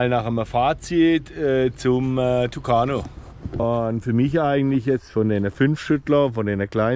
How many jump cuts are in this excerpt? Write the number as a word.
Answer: one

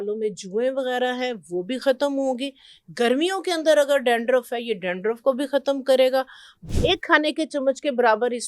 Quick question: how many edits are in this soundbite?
one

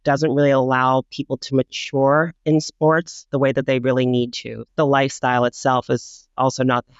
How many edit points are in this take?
two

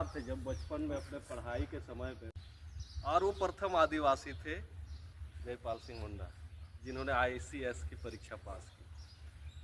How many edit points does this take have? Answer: one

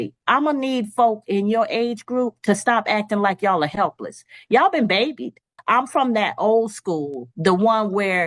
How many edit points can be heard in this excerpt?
one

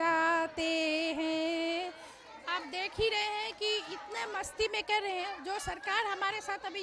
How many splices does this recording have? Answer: one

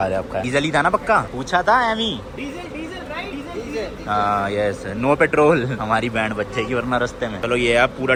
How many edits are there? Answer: zero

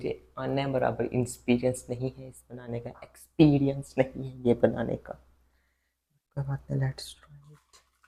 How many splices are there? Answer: zero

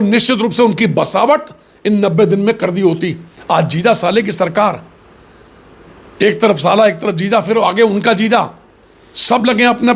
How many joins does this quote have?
one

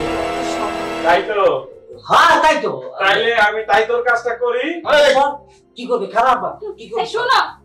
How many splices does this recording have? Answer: one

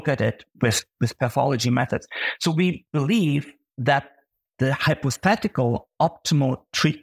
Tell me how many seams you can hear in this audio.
one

